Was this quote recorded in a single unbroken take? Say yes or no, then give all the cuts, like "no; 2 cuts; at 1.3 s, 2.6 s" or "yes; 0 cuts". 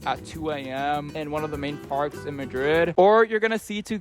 no; 1 cut; at 2.9 s